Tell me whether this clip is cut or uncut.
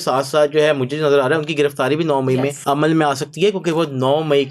cut